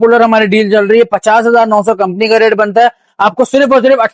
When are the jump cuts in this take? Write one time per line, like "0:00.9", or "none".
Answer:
none